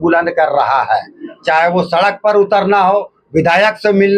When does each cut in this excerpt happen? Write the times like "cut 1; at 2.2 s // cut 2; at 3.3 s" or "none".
none